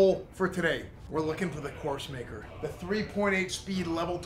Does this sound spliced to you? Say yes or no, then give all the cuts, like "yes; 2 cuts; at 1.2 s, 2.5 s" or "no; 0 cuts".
yes; 2 cuts; at 0.9 s, 2.4 s